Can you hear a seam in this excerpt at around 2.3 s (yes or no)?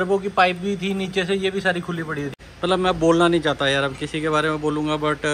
yes